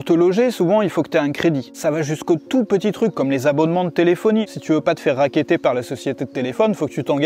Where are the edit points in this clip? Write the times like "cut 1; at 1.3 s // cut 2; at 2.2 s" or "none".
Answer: cut 1; at 1.7 s // cut 2; at 4.5 s